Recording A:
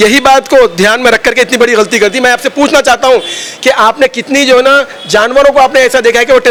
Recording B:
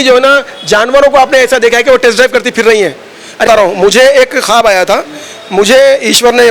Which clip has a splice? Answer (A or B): B